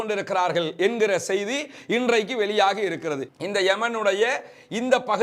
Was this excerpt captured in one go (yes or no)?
no